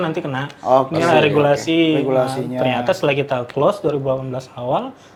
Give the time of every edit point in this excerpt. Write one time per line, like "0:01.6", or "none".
none